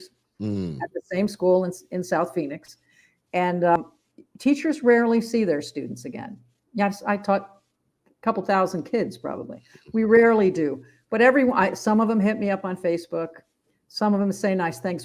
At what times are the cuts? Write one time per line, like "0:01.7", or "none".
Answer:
0:03.8

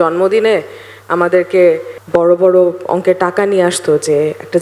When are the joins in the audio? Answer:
0:01.9

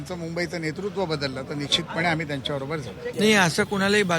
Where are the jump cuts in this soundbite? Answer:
0:03.0

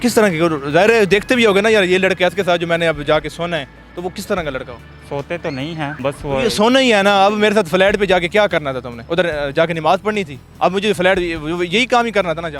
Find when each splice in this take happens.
none

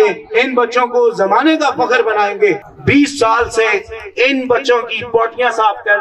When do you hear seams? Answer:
0:02.7

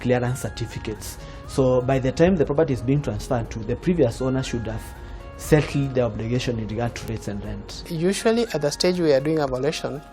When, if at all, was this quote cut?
0:07.8

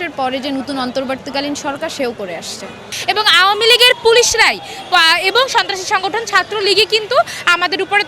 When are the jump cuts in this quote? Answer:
0:02.9

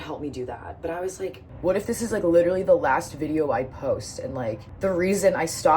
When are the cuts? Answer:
0:01.5
0:04.7

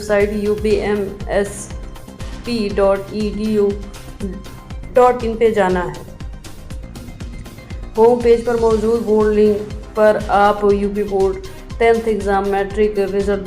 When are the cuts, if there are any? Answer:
0:06.1
0:07.9

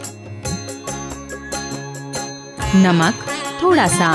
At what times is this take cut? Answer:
0:02.6

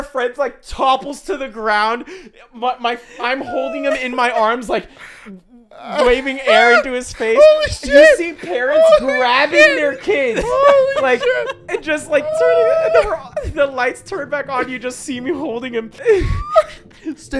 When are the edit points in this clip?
0:15.9

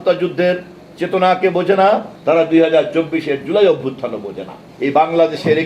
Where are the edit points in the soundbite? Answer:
0:02.1
0:04.6

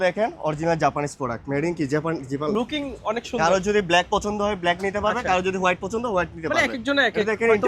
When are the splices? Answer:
0:02.5

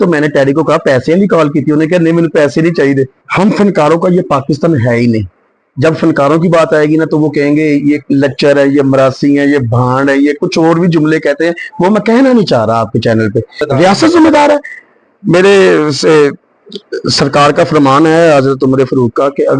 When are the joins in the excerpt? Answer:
0:03.2
0:13.6

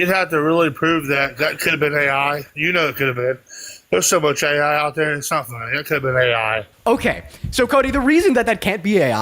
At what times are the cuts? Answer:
0:06.7

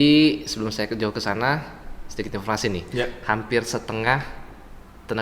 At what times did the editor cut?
none

